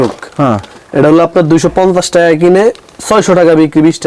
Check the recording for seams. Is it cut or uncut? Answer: uncut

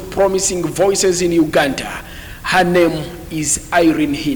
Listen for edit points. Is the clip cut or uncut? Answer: uncut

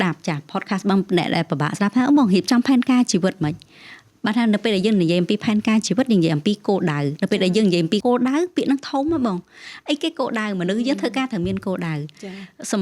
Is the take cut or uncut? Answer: cut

